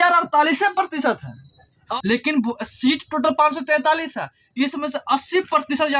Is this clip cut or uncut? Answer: cut